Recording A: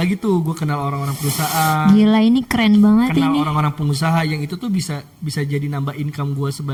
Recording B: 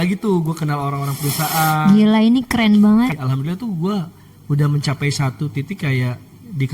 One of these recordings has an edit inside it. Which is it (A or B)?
B